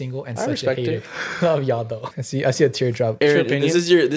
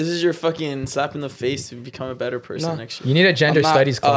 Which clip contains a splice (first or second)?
first